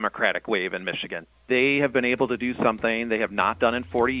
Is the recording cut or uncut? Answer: cut